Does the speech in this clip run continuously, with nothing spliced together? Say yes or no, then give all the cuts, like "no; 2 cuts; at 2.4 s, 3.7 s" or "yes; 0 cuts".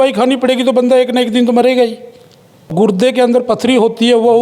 no; 1 cut; at 2.9 s